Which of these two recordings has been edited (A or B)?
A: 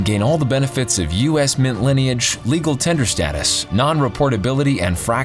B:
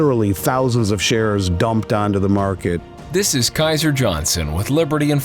B